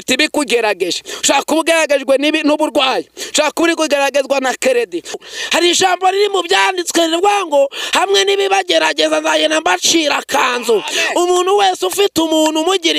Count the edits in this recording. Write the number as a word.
one